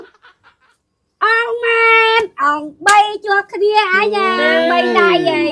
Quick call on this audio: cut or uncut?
uncut